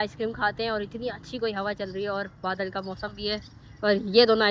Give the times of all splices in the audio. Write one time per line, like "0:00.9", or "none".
none